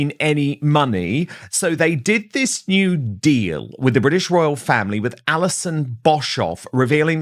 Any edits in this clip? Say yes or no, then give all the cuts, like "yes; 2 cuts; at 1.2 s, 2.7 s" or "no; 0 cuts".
no; 0 cuts